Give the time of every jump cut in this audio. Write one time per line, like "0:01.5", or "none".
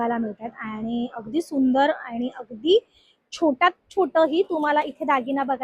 none